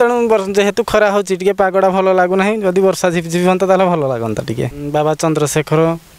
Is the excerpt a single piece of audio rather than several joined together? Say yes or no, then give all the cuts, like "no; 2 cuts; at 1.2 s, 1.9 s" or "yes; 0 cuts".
no; 1 cut; at 4.7 s